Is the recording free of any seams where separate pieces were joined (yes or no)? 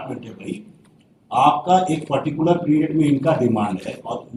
yes